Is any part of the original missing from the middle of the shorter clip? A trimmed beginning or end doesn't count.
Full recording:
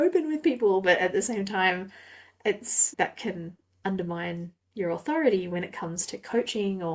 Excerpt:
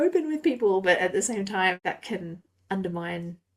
yes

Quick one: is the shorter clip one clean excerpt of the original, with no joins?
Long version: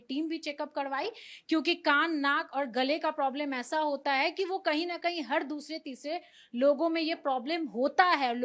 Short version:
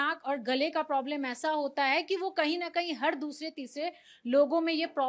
yes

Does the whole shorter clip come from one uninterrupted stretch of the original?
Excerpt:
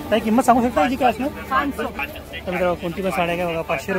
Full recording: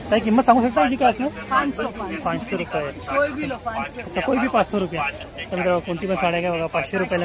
no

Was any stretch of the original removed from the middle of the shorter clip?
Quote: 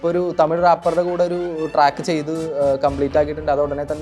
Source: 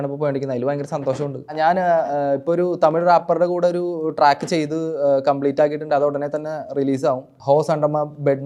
no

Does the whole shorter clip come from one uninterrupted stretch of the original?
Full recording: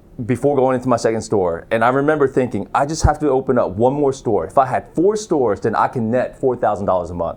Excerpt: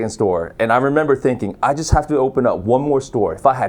yes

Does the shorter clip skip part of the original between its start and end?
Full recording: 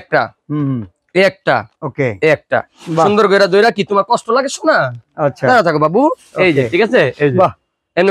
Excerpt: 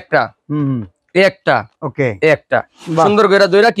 no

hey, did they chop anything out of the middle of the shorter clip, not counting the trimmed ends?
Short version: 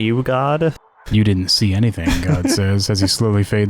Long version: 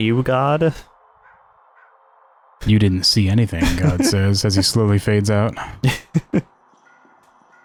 yes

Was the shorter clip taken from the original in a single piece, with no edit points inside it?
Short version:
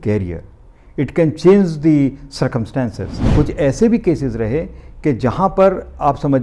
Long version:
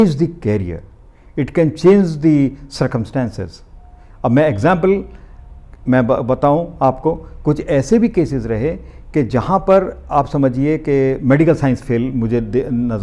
no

